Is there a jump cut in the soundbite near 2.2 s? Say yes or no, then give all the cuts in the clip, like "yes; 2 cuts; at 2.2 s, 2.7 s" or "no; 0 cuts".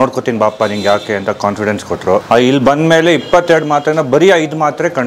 yes; 1 cut; at 2.2 s